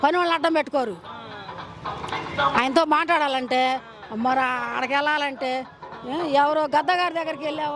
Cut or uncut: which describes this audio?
uncut